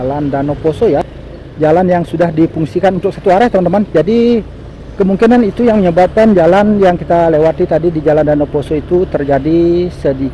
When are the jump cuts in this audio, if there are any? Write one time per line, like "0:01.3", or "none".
0:01.1